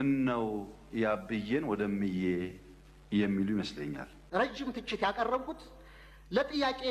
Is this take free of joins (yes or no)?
no